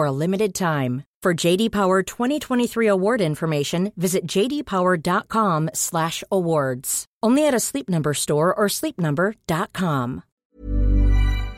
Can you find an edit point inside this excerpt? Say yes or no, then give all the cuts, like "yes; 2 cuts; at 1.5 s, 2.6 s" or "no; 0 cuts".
yes; 1 cut; at 10.3 s